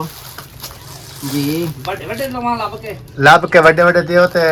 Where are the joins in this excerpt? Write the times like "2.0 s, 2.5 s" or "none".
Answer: none